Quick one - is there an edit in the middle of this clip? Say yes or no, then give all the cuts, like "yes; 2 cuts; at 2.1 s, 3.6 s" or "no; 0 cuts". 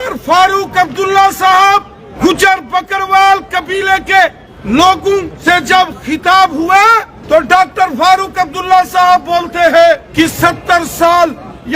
yes; 5 cuts; at 2.0 s, 4.5 s, 5.3 s, 7.1 s, 10.1 s